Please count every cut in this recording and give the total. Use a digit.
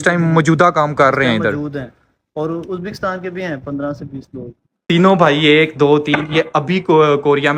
1